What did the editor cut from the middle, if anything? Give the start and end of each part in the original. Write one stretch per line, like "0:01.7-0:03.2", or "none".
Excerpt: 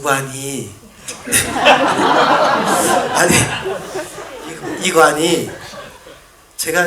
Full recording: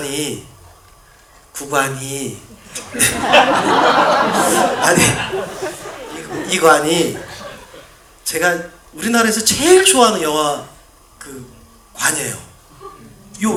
none